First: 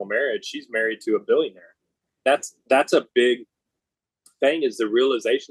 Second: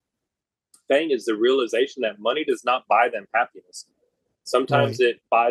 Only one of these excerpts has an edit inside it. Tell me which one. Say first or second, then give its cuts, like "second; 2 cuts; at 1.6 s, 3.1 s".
first; 1 cut; at 2.2 s